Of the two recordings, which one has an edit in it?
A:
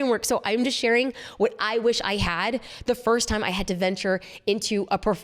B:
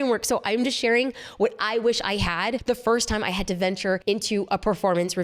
B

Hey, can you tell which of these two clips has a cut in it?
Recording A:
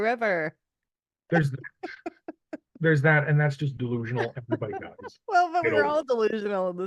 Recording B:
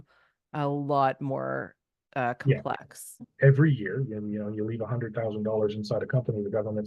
B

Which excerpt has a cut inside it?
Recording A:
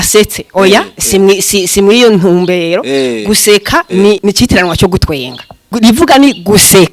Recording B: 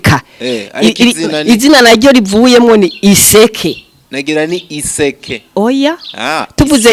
A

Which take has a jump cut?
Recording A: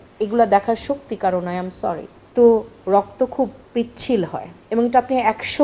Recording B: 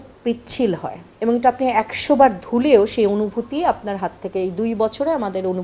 A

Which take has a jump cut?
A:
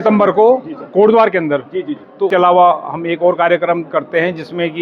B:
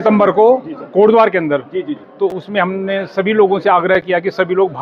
A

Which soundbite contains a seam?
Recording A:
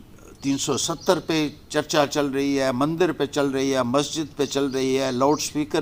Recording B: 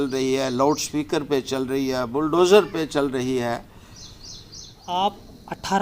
B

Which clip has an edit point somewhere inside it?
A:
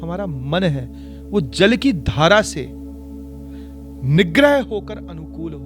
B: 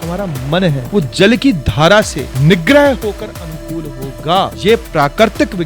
B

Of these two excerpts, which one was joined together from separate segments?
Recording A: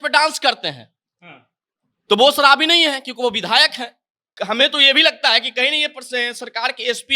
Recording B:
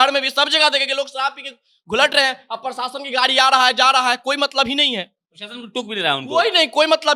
A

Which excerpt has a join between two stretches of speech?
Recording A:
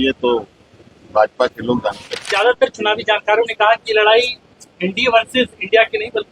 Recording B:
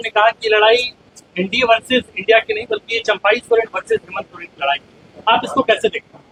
A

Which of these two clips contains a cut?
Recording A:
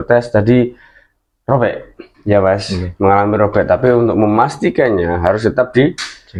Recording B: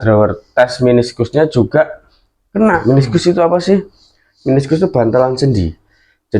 B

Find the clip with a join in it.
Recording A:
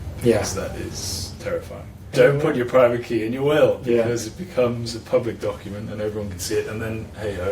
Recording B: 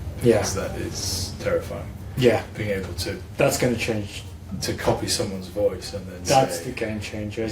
A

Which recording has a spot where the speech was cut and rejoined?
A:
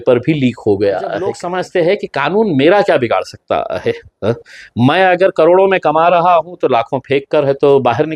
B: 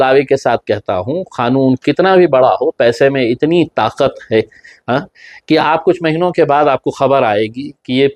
A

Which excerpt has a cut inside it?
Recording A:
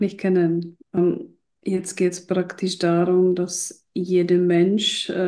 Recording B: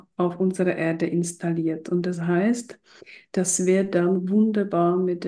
A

